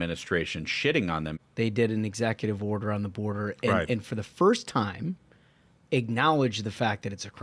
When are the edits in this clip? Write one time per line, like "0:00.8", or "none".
0:01.3